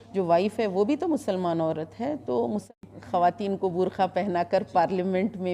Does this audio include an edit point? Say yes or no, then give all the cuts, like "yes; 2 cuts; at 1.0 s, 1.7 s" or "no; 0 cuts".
yes; 1 cut; at 2.6 s